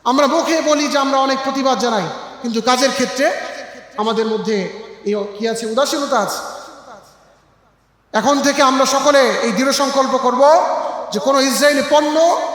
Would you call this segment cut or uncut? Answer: uncut